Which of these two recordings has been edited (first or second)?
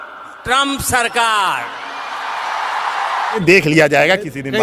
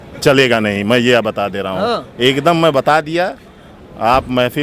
first